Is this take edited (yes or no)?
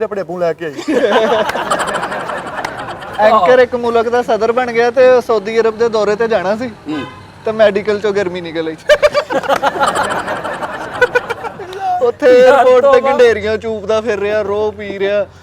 no